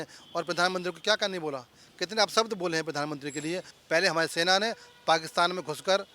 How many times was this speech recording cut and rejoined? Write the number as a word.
one